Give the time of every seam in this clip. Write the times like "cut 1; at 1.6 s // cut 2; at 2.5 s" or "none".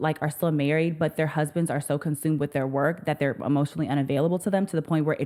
none